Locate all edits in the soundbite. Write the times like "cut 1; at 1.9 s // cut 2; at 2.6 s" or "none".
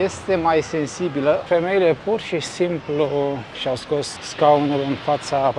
cut 1; at 1.4 s // cut 2; at 3.7 s